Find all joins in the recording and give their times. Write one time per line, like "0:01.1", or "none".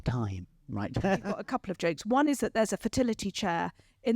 0:01.4